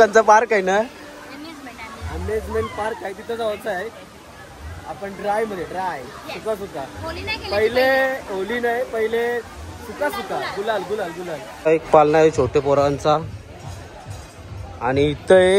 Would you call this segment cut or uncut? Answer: cut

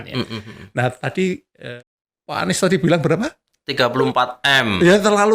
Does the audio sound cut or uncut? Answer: cut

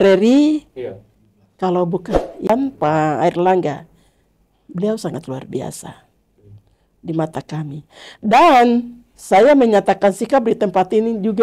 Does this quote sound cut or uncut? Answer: cut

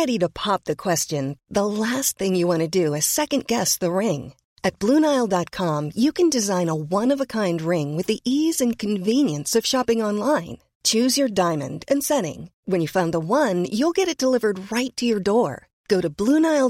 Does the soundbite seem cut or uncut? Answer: uncut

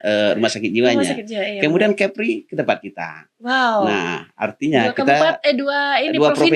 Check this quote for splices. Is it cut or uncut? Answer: uncut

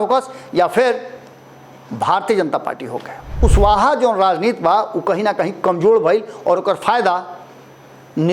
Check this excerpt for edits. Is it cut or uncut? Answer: cut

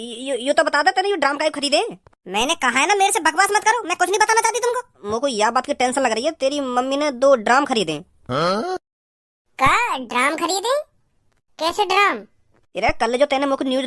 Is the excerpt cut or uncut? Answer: cut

